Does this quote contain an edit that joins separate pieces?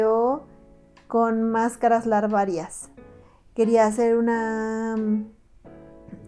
no; 0 cuts

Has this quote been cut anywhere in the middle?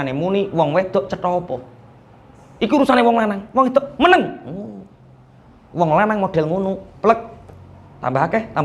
no; 0 cuts

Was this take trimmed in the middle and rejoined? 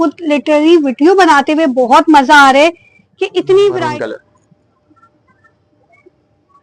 yes; 1 cut; at 3.9 s

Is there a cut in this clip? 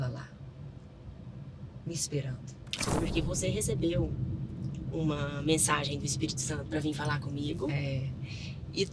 yes; 1 cut; at 2.9 s

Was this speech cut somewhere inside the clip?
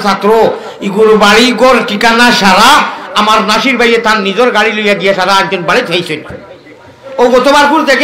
yes; 1 cut; at 7.1 s

